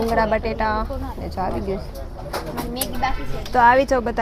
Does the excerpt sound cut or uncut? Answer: uncut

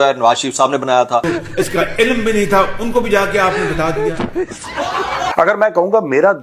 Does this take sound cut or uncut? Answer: cut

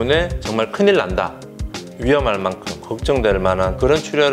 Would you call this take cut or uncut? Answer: cut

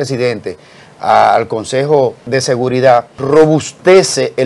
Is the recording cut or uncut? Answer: cut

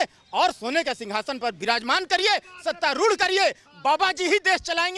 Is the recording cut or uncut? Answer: uncut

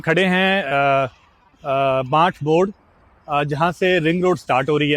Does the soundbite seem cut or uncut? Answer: uncut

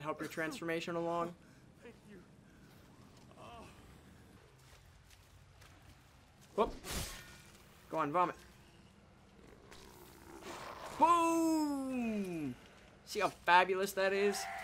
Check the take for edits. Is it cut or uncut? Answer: cut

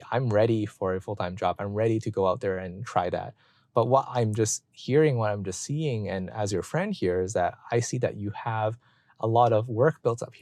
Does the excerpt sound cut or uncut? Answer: uncut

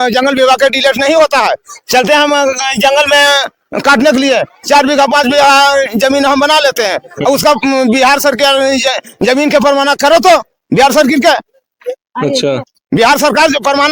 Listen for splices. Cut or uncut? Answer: uncut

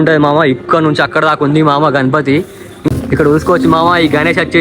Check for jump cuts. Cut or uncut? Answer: cut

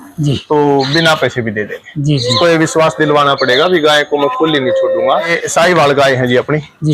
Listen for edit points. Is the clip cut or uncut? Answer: cut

